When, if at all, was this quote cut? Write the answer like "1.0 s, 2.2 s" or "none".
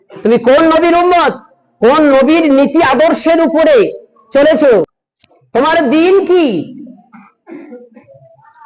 5.0 s